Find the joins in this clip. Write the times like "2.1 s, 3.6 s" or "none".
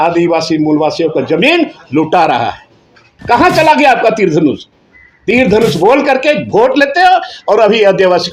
3.1 s